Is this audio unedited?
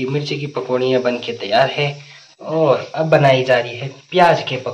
yes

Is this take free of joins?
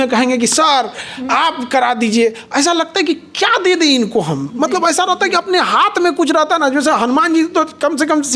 yes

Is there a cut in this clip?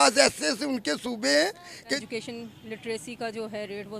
yes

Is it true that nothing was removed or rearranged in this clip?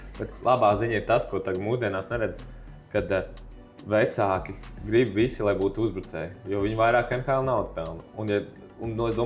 yes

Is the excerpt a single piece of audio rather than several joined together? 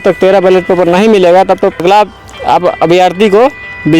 no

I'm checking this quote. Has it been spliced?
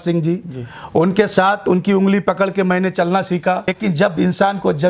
yes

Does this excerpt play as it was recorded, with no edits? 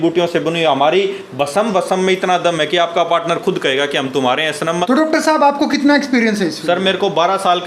no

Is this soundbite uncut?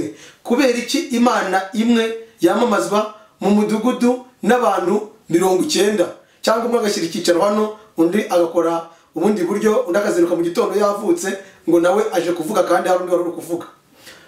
yes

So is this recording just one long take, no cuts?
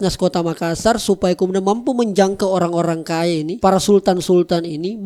yes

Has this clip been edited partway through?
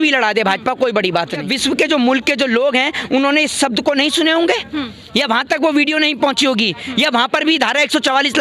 yes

